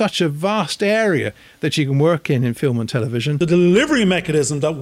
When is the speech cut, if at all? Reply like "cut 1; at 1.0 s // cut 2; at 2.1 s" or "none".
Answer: cut 1; at 3.3 s